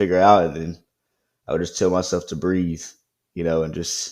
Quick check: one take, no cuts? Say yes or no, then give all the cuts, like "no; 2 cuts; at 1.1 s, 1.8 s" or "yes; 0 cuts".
yes; 0 cuts